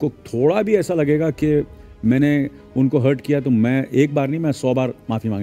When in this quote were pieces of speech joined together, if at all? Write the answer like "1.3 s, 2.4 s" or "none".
none